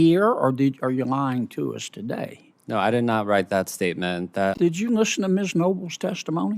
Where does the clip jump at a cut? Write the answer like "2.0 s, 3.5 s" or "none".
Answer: 4.6 s